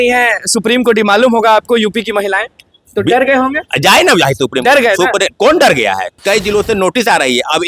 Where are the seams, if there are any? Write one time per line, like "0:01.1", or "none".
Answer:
0:06.2